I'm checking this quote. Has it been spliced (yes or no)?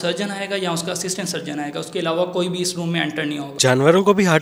yes